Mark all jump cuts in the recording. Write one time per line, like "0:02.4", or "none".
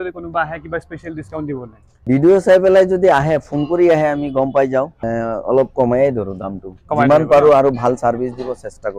0:02.0
0:05.0